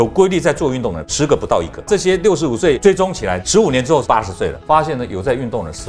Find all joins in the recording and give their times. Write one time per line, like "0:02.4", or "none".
0:01.9
0:04.1